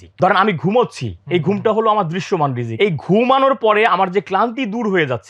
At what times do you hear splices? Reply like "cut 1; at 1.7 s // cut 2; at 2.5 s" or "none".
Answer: cut 1; at 2.6 s